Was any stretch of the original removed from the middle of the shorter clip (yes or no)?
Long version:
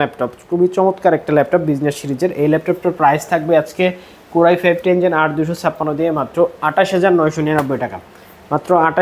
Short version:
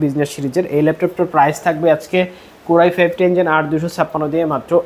no